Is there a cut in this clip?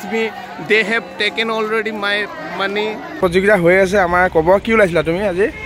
yes; 1 cut; at 3.2 s

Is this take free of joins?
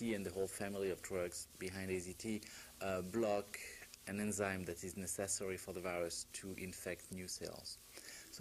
no; 1 cut; at 3.5 s

